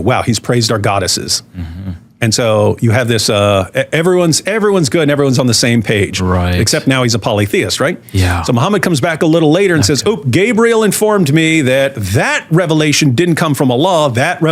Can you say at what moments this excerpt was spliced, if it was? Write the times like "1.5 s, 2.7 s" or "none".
none